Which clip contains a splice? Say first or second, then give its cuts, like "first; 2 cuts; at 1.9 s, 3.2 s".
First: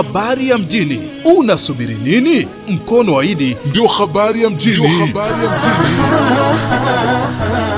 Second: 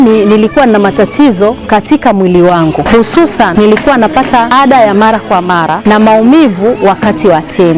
second; 3 cuts; at 3.5 s, 4.5 s, 5.8 s